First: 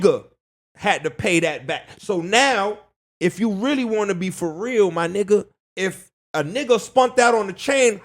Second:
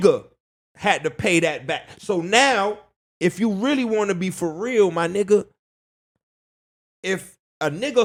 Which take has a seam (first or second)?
first